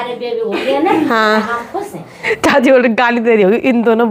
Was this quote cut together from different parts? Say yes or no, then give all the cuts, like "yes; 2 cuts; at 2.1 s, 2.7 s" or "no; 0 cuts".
yes; 1 cut; at 2.4 s